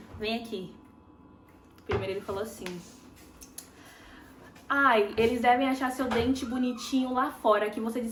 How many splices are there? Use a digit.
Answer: 0